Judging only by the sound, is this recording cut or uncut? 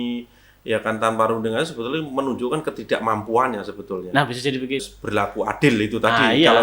cut